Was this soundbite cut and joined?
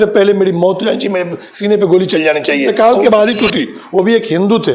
yes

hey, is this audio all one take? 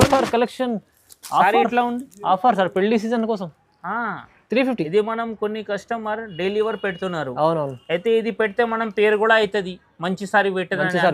yes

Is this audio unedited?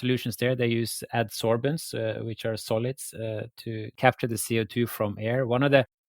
no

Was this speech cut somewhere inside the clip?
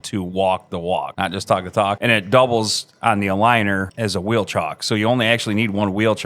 yes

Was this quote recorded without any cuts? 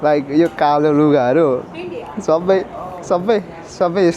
yes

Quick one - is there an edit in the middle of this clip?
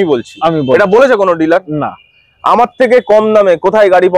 no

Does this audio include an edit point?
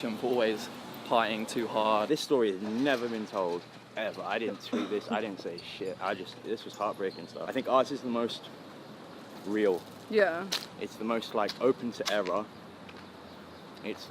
yes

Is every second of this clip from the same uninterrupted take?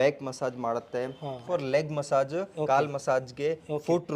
no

